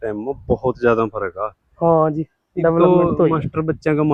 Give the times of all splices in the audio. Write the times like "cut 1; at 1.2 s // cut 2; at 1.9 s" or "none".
none